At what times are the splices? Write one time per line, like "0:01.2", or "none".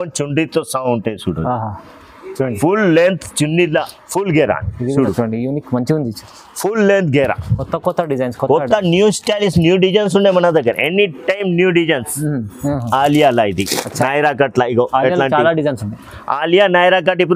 0:03.8
0:12.6